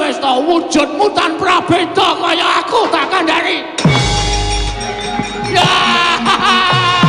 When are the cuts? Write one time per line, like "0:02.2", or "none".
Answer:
0:04.7